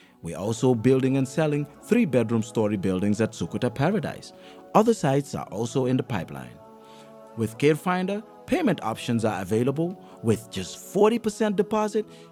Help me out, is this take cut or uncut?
uncut